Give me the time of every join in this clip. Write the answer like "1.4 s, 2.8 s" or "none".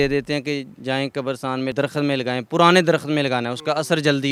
none